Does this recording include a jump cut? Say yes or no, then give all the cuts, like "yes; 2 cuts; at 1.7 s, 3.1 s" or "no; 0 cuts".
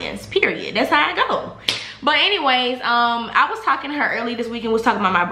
no; 0 cuts